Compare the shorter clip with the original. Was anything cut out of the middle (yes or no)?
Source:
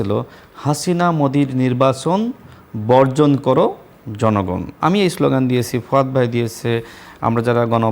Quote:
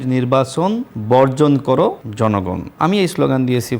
yes